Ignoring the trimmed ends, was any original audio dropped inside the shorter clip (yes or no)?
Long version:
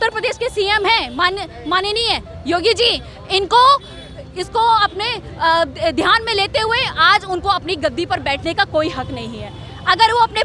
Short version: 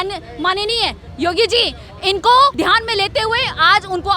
yes